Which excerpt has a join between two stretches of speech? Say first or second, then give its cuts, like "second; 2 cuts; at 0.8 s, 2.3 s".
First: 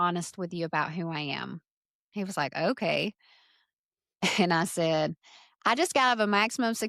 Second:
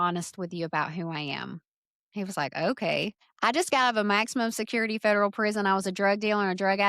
second; 1 cut; at 3.2 s